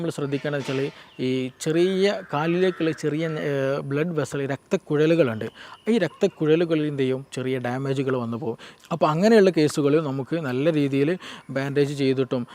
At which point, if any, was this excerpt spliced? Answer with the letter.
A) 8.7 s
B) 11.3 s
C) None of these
A